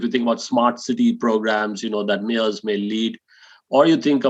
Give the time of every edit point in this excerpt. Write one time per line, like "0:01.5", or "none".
none